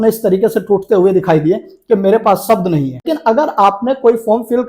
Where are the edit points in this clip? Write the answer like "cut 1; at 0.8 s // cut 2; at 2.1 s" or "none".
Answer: cut 1; at 3.1 s